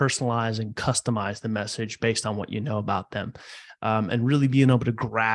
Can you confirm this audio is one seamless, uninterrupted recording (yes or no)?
yes